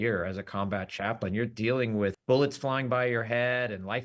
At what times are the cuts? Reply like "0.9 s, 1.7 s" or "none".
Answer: 2.2 s